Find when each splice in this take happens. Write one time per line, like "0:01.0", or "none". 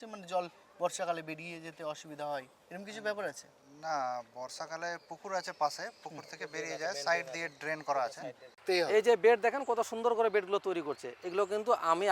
0:08.6